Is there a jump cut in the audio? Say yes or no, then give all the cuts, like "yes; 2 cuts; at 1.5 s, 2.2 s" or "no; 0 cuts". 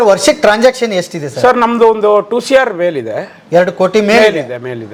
no; 0 cuts